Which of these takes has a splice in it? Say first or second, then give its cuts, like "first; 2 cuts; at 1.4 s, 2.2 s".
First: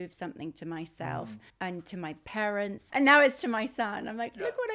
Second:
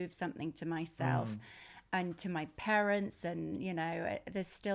first; 2 cuts; at 1.4 s, 2.8 s